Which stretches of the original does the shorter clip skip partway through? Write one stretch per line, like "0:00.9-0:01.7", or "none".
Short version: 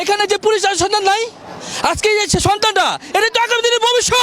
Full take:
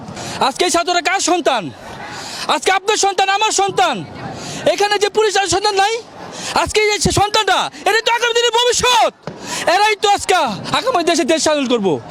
none